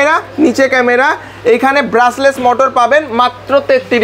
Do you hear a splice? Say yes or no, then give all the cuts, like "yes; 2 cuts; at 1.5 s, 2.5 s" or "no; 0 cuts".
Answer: no; 0 cuts